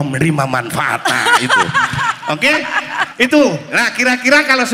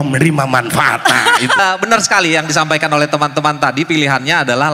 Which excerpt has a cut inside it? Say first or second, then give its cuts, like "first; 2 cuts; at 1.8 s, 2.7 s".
second; 1 cut; at 1.6 s